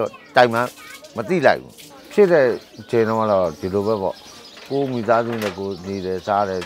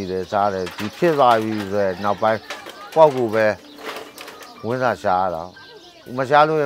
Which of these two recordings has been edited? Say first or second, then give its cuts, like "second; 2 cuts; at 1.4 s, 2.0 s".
first; 1 cut; at 1.9 s